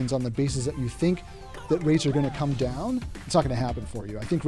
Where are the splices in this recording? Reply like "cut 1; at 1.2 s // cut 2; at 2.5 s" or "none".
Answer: cut 1; at 3.2 s